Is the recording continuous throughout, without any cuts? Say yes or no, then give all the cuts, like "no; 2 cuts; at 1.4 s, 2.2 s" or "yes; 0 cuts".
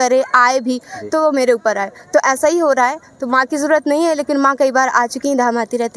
yes; 0 cuts